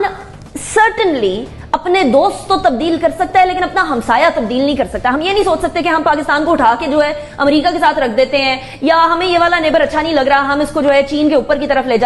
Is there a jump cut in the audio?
no; 0 cuts

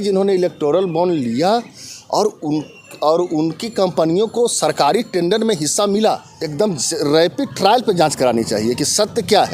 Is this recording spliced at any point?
yes; 1 cut; at 6.4 s

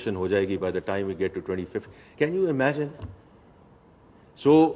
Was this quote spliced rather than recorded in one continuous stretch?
no; 0 cuts

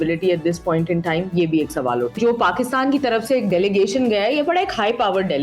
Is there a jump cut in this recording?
yes; 1 cut; at 2.2 s

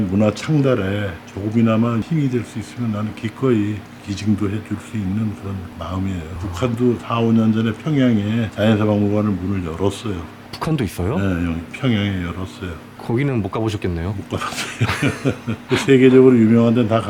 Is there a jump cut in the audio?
no; 0 cuts

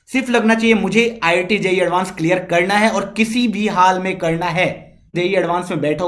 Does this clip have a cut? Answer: yes; 1 cut; at 5.1 s

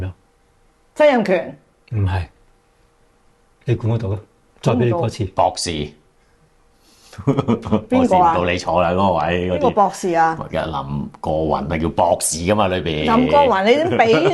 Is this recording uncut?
yes; 0 cuts

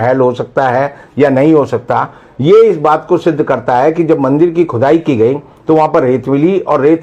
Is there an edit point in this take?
no; 0 cuts

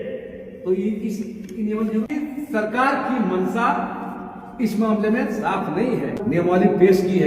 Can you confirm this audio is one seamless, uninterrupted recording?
no; 2 cuts; at 2.1 s, 6.2 s

